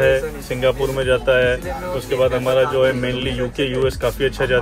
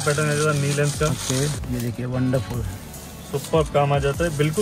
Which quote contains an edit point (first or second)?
second